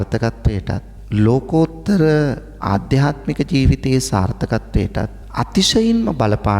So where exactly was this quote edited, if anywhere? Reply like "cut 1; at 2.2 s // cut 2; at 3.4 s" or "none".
cut 1; at 0.9 s // cut 2; at 5.2 s

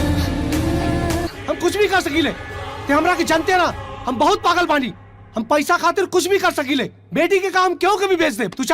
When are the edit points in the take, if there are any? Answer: cut 1; at 1.3 s

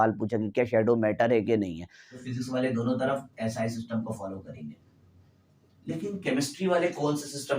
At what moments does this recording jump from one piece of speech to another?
cut 1; at 2.2 s

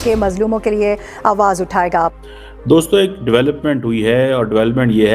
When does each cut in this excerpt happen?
cut 1; at 2.1 s

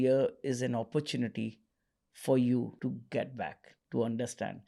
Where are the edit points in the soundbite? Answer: cut 1; at 2.7 s

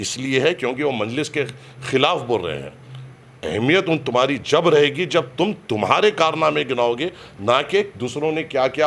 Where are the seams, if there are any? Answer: none

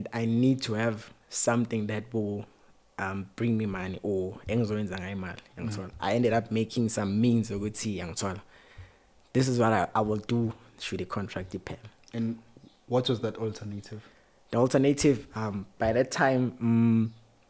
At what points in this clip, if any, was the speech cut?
none

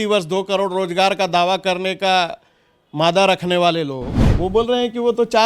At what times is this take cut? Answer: cut 1; at 4.3 s

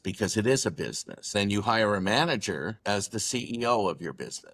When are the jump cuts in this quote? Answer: cut 1; at 1.3 s // cut 2; at 2.8 s

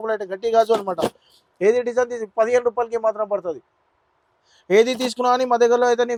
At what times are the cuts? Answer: none

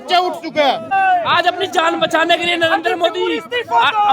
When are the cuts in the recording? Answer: cut 1; at 0.9 s

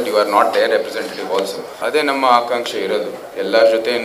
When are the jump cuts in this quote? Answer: cut 1; at 1.7 s

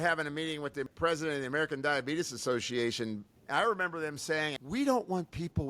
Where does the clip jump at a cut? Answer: cut 1; at 0.9 s // cut 2; at 3.3 s // cut 3; at 4.6 s

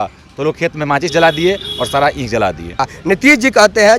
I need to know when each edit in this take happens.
cut 1; at 2.9 s

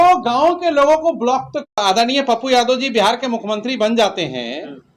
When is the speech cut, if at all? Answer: cut 1; at 1.8 s

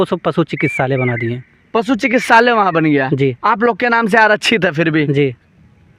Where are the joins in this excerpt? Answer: none

